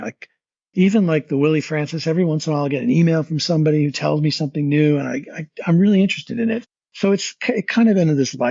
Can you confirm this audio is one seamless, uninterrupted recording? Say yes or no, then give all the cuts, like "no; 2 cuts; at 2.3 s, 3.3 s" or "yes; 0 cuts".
yes; 0 cuts